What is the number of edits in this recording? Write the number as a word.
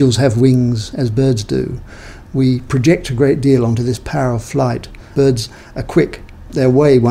one